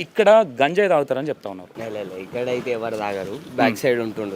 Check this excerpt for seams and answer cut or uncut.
cut